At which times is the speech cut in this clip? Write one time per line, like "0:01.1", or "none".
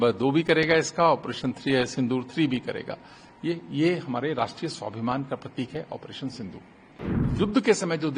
0:07.2